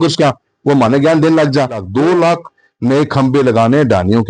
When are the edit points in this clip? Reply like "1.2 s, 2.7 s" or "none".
1.9 s